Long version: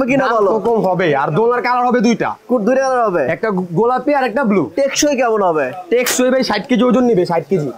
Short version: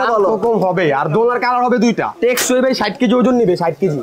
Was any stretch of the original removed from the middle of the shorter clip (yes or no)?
yes